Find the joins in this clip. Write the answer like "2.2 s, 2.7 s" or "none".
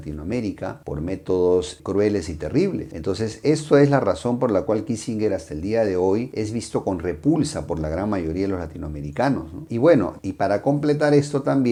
none